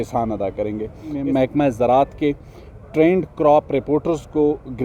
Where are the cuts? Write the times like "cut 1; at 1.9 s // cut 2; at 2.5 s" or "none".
cut 1; at 1.2 s